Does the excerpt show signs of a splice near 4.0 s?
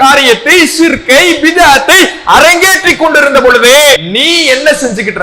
yes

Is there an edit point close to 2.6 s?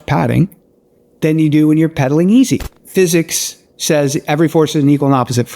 yes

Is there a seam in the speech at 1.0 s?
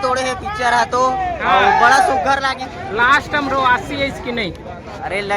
no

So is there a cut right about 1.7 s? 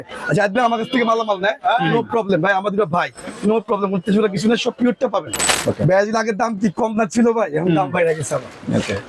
no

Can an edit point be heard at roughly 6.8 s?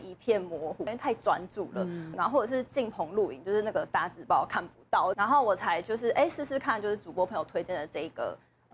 no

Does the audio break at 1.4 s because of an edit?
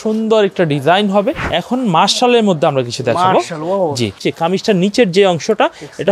yes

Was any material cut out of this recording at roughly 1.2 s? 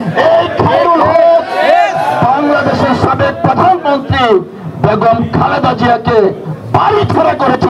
no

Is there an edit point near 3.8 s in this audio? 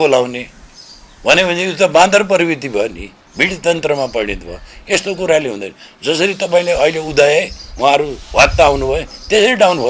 no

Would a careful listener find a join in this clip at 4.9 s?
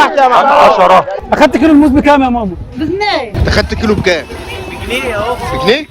no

